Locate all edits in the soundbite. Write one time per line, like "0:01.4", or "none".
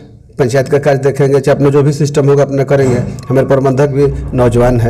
none